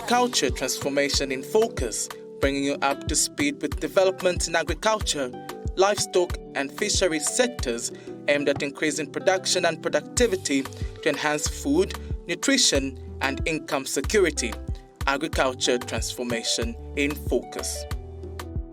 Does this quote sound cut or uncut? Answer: cut